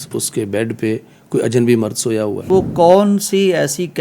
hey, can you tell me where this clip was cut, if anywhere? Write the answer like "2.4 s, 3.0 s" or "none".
2.5 s